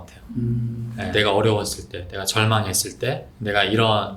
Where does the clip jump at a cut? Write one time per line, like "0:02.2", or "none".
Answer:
0:01.1
0:03.3